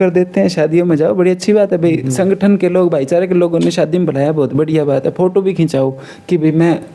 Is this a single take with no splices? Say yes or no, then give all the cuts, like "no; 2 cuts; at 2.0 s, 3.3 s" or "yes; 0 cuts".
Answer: yes; 0 cuts